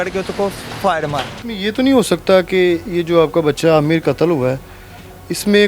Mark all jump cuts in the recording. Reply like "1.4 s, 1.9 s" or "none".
1.4 s